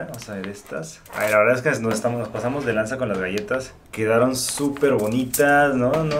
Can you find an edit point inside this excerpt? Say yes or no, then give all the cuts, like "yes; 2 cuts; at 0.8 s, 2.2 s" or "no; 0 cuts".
yes; 1 cut; at 1.0 s